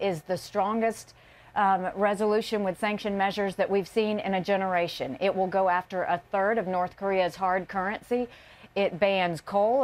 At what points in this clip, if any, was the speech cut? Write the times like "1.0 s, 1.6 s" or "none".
1.8 s